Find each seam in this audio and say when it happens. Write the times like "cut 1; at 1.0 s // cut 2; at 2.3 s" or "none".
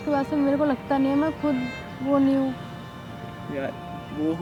none